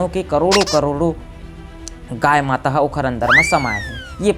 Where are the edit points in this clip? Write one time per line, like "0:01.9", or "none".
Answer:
none